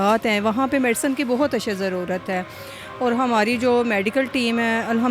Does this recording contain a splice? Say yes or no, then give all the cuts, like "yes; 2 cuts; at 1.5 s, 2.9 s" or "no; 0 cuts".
no; 0 cuts